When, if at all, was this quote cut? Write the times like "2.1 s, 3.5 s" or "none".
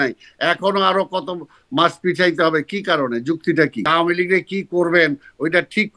3.9 s